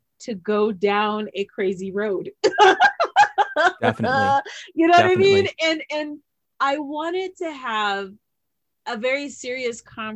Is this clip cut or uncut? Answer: uncut